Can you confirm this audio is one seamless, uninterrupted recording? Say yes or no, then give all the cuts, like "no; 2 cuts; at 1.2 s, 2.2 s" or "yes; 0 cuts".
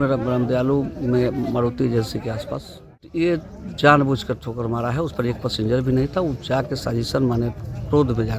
no; 1 cut; at 3.1 s